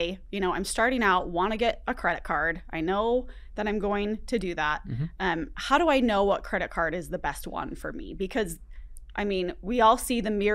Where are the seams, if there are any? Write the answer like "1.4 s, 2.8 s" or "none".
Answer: none